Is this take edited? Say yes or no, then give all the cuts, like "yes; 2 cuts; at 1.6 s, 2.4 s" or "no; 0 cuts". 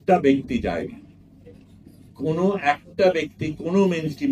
no; 0 cuts